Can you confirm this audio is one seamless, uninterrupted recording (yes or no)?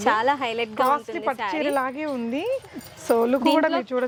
yes